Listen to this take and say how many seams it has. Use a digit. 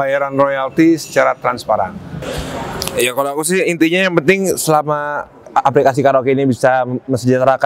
1